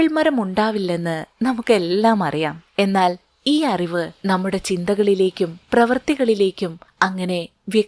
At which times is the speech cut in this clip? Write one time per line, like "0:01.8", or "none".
0:02.6
0:04.1
0:06.8